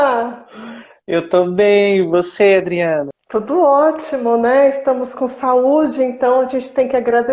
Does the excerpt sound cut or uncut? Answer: cut